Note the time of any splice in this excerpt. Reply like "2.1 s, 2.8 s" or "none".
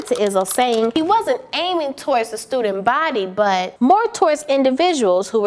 0.9 s, 3.7 s